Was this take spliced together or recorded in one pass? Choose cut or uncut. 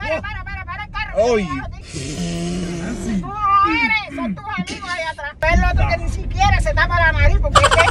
uncut